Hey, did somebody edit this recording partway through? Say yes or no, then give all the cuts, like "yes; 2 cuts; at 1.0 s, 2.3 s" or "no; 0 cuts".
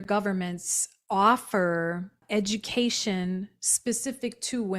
yes; 1 cut; at 2.2 s